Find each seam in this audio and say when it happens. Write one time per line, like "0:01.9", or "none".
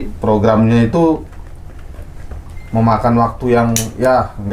none